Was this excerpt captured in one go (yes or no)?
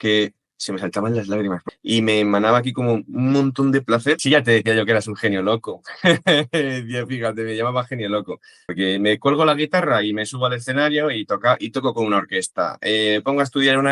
no